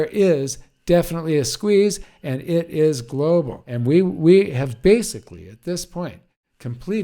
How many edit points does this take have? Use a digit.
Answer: 1